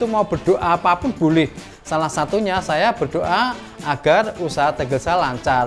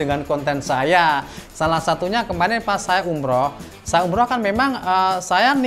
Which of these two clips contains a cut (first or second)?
second